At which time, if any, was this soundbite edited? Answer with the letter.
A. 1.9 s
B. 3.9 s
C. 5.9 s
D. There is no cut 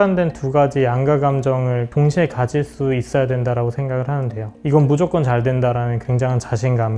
A